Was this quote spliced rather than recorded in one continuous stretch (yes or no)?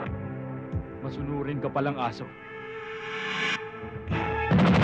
yes